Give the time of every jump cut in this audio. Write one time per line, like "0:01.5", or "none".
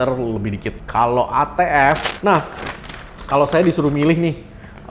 0:02.0